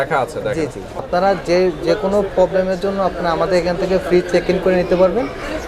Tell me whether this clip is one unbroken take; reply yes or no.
no